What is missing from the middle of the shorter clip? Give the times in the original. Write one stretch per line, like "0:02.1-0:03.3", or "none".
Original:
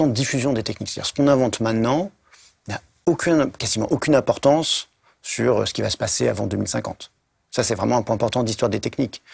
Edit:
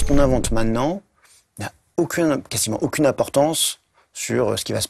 none